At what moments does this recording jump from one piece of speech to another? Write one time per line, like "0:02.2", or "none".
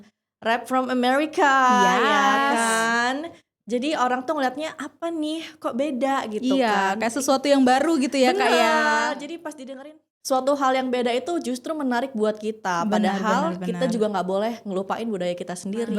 0:10.1